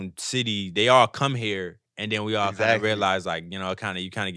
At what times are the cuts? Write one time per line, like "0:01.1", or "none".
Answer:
none